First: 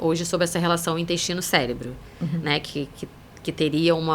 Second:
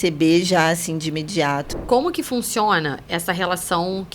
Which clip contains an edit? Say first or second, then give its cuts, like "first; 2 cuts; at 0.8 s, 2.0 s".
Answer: second; 1 cut; at 1.7 s